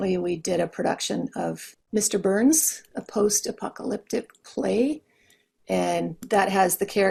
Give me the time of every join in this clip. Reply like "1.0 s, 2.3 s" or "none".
none